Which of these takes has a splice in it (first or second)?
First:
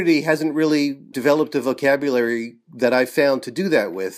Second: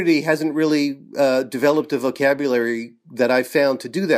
first